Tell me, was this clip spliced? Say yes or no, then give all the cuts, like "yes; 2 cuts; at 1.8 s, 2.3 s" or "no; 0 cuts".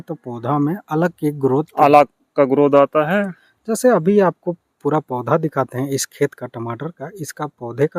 no; 0 cuts